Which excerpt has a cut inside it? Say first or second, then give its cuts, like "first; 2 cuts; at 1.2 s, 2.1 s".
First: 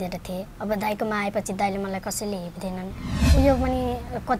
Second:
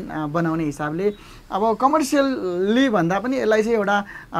first; 1 cut; at 3.2 s